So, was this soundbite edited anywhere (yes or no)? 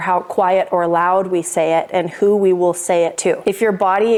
no